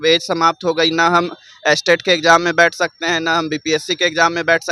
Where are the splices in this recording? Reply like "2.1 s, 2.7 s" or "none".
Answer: none